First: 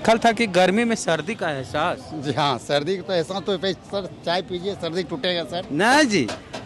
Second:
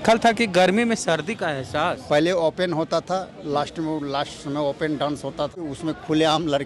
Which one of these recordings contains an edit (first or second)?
second